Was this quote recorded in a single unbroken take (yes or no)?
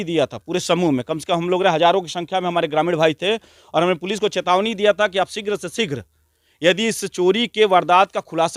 yes